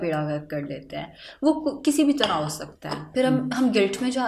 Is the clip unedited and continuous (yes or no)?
yes